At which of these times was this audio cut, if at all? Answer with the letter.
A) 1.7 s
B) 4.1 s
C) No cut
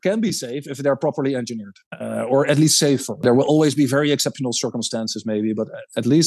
C